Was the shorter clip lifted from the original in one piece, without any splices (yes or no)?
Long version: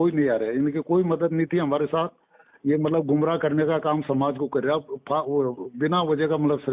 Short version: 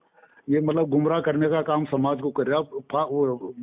yes